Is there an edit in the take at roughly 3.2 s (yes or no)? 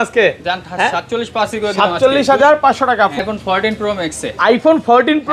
yes